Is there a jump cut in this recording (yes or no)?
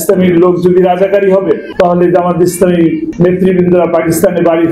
yes